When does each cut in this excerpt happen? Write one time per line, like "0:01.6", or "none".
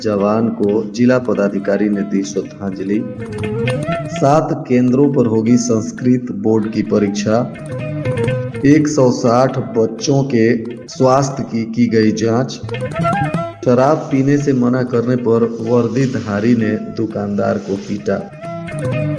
none